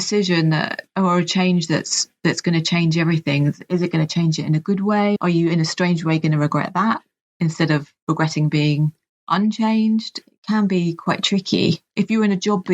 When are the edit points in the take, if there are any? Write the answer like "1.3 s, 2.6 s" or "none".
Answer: 5.2 s, 10.1 s, 11.9 s